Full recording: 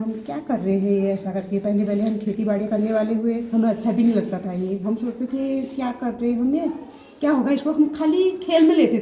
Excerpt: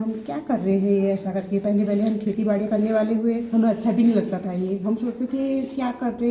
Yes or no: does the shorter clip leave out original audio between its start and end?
no